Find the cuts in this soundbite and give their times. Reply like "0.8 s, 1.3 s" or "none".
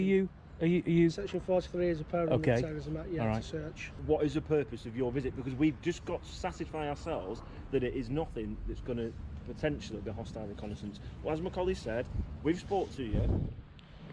3.9 s